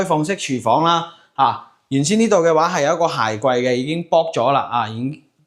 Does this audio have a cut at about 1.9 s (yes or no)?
no